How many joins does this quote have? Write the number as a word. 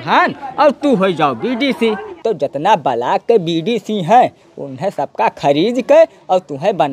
one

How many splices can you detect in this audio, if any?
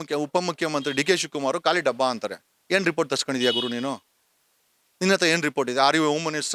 zero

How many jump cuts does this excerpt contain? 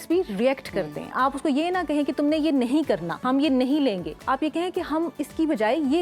three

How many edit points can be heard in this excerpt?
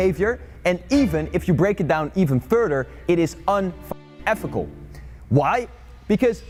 zero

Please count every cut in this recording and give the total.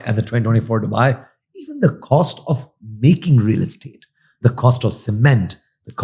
zero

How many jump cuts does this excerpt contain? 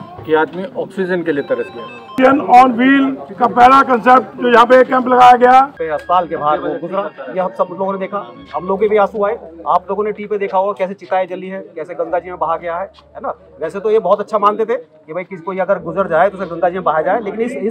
two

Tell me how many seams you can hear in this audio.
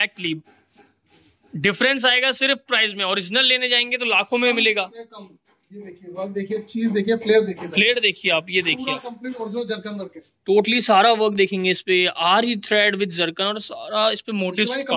zero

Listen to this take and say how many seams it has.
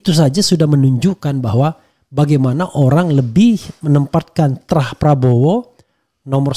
zero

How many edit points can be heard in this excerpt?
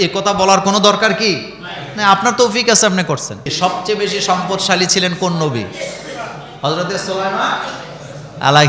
one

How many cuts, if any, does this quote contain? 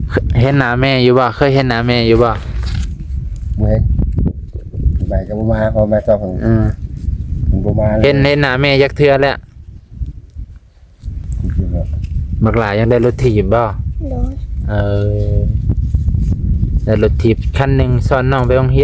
one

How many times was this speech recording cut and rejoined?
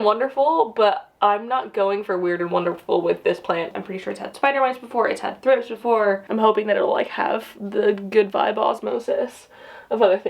two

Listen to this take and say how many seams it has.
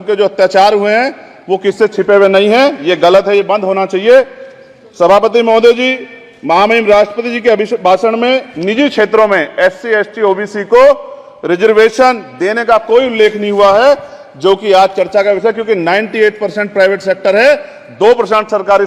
zero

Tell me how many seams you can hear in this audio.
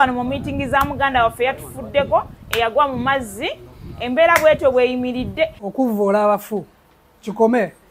one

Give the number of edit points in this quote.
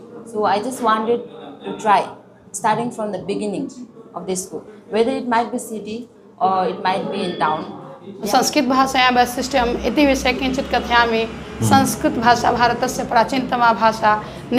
one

